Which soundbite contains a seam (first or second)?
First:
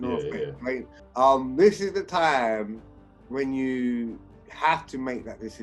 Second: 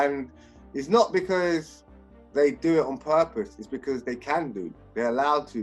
first